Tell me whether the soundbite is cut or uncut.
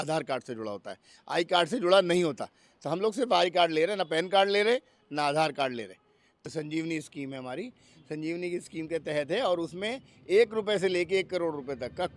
cut